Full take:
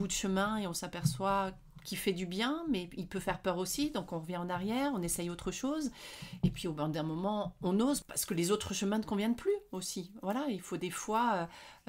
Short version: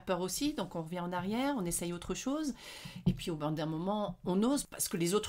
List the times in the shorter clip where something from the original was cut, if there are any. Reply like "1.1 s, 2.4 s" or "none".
none